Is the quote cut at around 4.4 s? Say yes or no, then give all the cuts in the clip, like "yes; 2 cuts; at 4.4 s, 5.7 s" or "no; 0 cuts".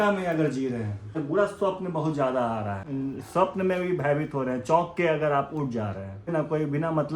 no; 3 cuts; at 1.1 s, 2.8 s, 6.3 s